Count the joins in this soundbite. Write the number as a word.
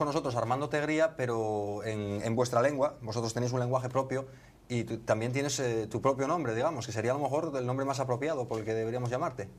zero